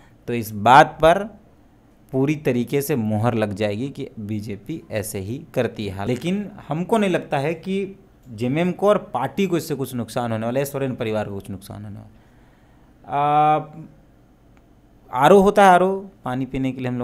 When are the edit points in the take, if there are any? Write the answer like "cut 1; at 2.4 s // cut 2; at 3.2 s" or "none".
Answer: cut 1; at 6.1 s